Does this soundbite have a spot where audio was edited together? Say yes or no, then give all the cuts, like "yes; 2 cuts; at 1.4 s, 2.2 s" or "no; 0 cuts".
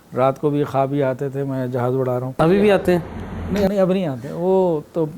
yes; 1 cut; at 2.3 s